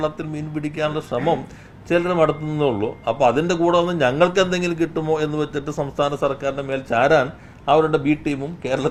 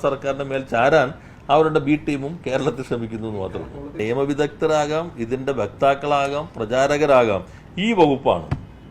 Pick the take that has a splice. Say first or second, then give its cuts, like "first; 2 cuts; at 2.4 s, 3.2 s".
second; 1 cut; at 4.0 s